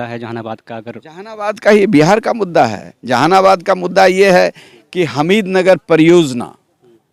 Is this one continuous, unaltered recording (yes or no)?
yes